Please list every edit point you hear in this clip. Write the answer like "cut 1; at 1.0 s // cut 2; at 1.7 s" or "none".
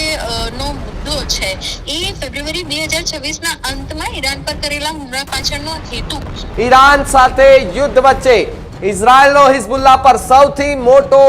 cut 1; at 6.4 s